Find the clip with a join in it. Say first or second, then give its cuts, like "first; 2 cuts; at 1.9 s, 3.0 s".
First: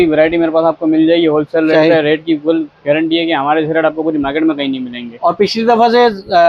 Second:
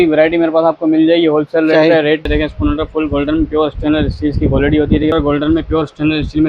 second; 2 cuts; at 2.3 s, 5.1 s